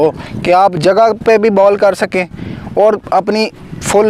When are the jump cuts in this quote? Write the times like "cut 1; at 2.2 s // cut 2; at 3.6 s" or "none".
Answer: none